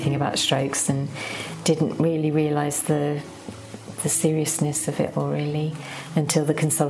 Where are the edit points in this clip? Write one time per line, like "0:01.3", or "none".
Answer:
none